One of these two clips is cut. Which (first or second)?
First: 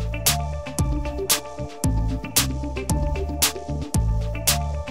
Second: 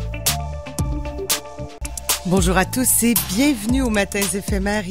second